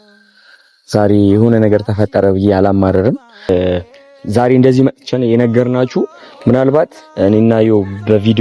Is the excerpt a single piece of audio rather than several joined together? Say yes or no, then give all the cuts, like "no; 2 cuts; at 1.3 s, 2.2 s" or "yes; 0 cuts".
no; 1 cut; at 3.5 s